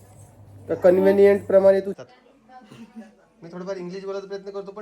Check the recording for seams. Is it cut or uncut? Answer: cut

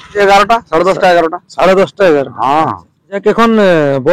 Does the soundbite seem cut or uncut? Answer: cut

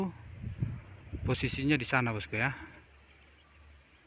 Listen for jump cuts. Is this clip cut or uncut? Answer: cut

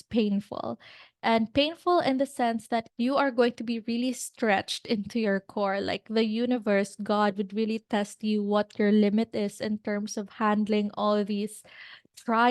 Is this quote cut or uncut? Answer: cut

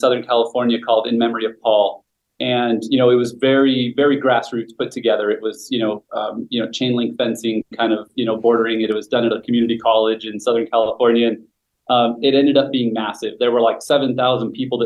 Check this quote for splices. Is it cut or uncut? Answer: uncut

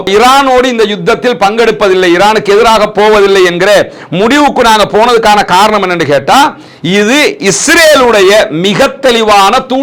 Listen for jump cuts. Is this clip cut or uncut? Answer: uncut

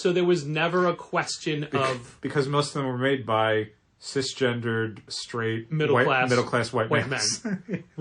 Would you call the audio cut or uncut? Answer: cut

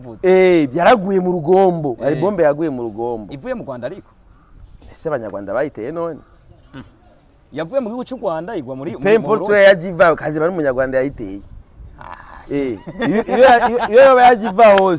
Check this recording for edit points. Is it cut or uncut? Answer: uncut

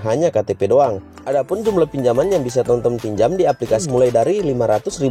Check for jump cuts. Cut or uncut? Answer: cut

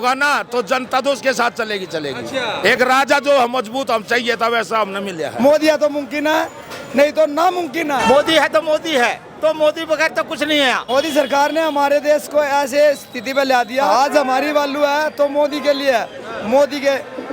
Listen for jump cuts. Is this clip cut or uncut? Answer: cut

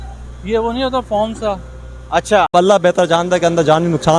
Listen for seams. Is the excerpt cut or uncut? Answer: cut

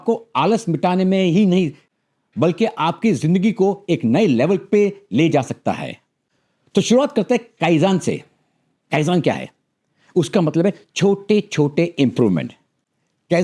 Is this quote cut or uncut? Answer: uncut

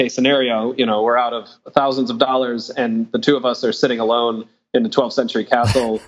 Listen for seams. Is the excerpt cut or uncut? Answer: cut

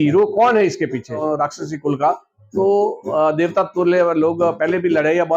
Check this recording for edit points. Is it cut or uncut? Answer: cut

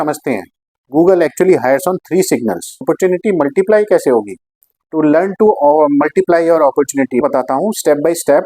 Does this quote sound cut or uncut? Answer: cut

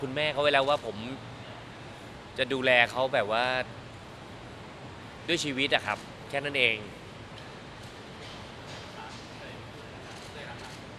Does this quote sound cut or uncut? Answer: uncut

